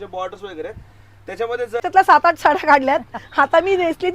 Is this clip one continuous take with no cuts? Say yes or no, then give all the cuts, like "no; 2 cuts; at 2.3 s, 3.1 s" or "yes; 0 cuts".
no; 1 cut; at 1.8 s